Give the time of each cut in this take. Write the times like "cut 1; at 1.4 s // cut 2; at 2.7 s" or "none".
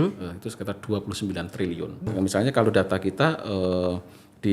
cut 1; at 2.0 s